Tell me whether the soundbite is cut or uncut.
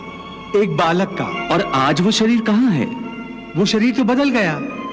cut